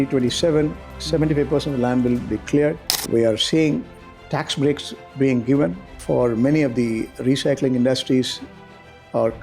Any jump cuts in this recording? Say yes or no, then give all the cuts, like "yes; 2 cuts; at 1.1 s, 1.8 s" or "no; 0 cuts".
yes; 2 cuts; at 2.9 s, 5.9 s